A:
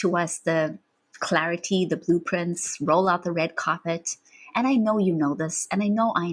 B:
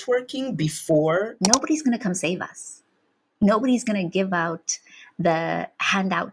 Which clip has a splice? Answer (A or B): B